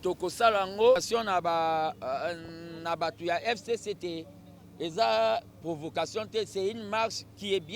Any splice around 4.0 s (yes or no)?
no